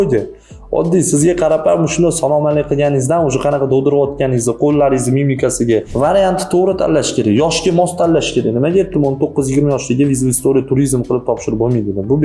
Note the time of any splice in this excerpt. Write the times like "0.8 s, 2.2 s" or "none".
5.9 s